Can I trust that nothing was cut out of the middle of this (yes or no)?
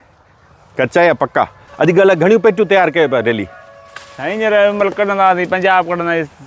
no